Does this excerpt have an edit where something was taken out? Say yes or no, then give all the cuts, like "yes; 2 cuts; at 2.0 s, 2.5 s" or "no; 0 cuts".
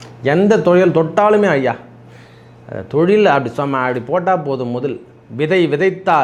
no; 0 cuts